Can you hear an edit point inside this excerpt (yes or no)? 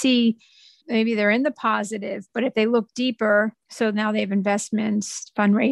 yes